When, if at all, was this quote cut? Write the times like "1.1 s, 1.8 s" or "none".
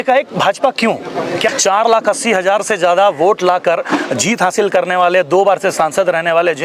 1.5 s

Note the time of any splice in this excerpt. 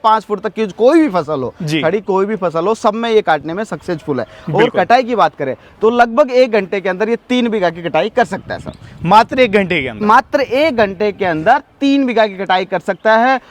none

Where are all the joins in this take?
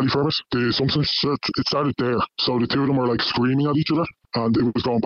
0.9 s

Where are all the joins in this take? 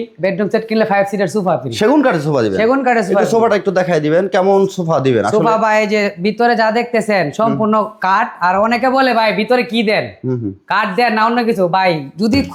none

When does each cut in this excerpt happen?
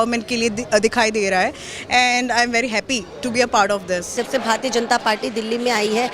4.1 s

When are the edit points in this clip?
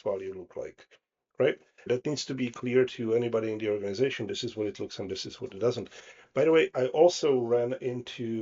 1.8 s

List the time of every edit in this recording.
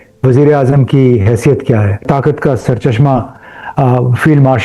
2.0 s

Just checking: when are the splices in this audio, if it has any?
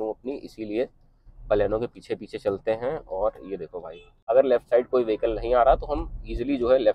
4.3 s

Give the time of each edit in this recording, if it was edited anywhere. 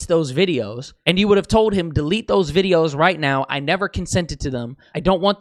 none

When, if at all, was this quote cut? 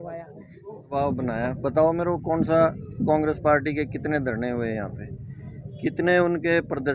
0.9 s

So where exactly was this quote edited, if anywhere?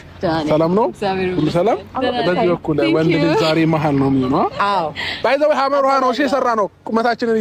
5.1 s

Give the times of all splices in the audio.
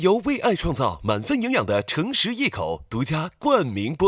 none

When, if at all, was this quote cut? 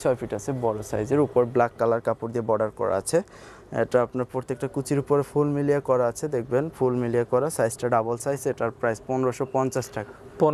none

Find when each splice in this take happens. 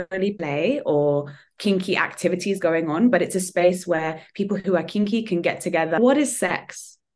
6.0 s

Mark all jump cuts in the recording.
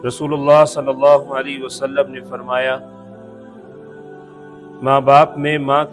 3.2 s, 4.8 s

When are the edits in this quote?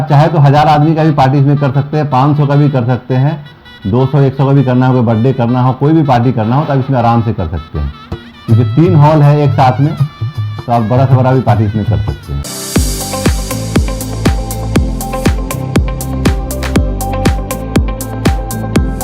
12.4 s

